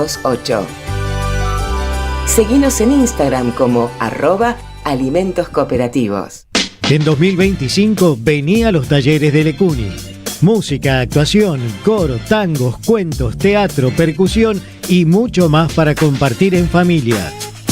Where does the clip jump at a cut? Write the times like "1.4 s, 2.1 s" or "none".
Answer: 6.4 s